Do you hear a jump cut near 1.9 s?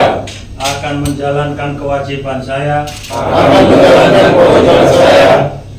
no; 0 cuts

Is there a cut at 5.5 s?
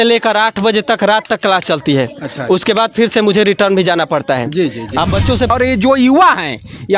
yes; 1 cut; at 5.5 s

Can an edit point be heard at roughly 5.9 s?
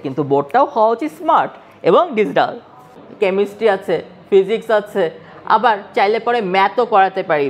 no; 1 cut; at 2.9 s

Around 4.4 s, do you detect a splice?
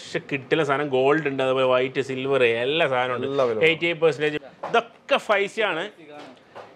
yes; 1 cut; at 4.4 s

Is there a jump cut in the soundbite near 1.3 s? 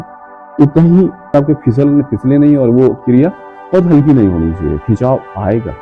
yes; 1 cut; at 1.3 s

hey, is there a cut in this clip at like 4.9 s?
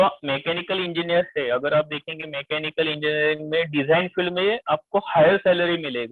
no; 0 cuts

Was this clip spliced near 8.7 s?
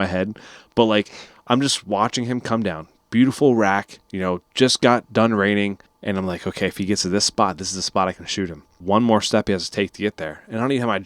yes; 2 cuts; at 5.9 s, 8.7 s

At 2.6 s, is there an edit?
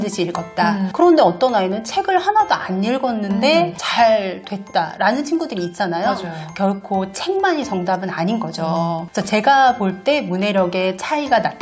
no; 1 cut; at 0.9 s

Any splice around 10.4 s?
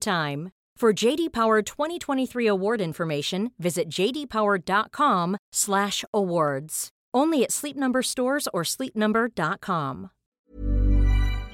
yes; 1 cut; at 10.4 s

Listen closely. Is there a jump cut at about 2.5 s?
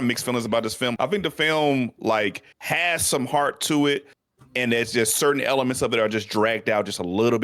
yes; 2 cuts; at 1.0 s, 2.5 s

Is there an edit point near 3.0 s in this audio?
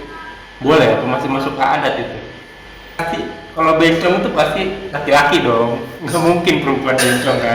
yes; 1 cut; at 3.0 s

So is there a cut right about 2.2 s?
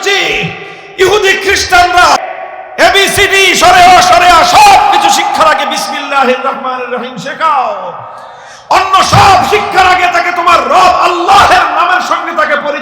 yes; 1 cut; at 2.2 s

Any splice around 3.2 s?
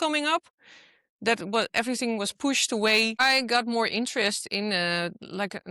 yes; 1 cut; at 3.2 s

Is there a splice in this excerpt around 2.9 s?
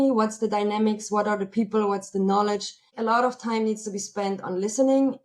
yes; 1 cut; at 2.9 s

